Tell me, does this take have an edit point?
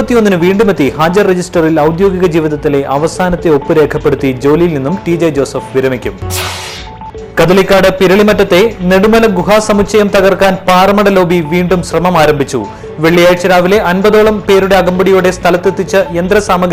no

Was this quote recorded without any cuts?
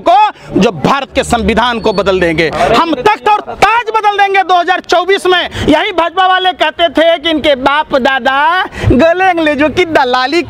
no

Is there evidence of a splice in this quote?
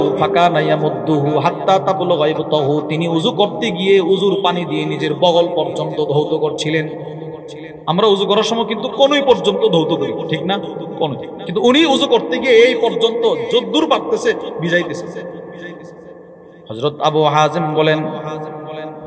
no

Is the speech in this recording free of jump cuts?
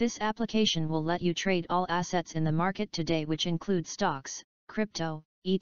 yes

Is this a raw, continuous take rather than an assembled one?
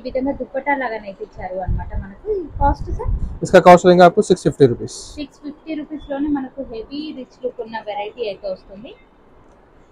yes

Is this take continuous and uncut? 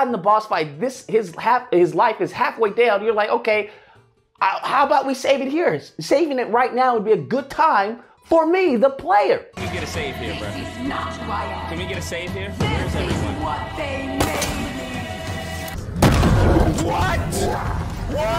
no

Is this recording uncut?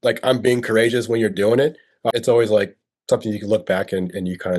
no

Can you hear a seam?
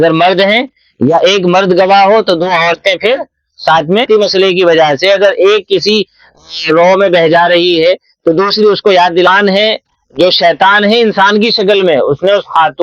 yes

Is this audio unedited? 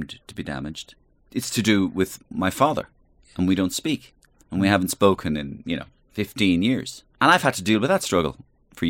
no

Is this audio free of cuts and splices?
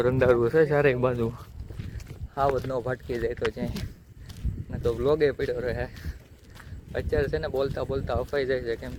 yes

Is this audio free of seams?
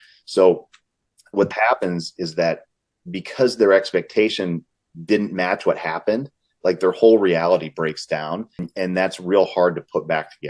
no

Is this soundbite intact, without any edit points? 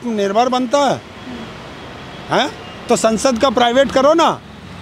yes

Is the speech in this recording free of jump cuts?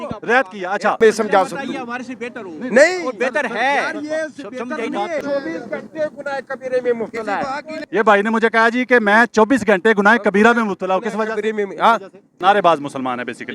no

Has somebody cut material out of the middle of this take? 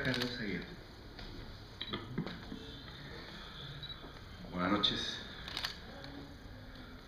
no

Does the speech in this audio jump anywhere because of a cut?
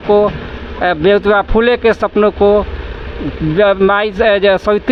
no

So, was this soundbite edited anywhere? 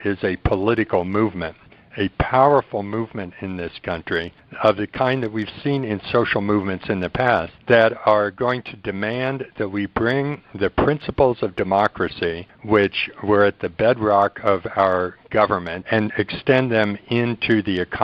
yes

